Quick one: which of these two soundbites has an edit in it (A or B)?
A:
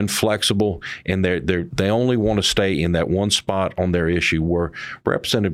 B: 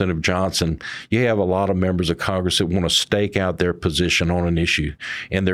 A